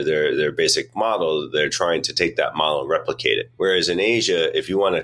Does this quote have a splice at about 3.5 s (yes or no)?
yes